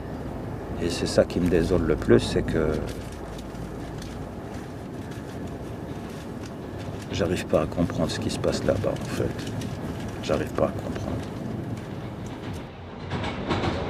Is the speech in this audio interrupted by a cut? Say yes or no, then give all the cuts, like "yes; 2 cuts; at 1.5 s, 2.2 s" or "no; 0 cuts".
no; 0 cuts